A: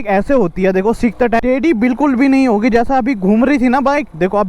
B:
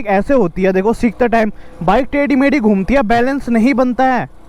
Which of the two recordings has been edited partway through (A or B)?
A